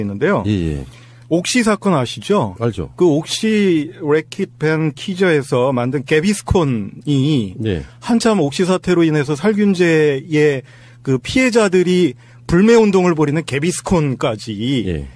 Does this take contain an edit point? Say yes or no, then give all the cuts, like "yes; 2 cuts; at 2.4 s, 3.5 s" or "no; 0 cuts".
yes; 1 cut; at 5.7 s